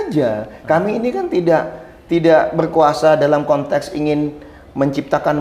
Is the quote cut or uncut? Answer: uncut